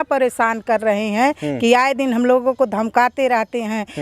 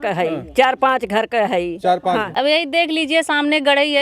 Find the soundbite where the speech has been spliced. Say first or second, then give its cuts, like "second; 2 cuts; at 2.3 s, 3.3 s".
second; 1 cut; at 2.3 s